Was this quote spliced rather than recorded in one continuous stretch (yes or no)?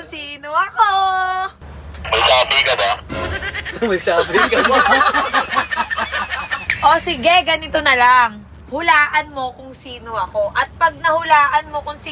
yes